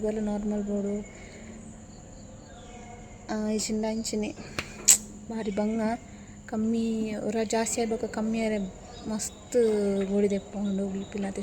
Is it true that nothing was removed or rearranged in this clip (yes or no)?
yes